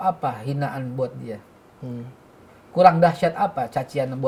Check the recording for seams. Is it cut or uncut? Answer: uncut